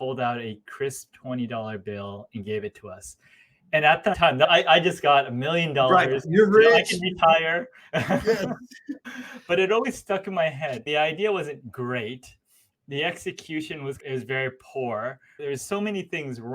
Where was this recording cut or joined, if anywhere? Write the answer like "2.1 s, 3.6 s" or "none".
4.3 s, 8.9 s, 10.8 s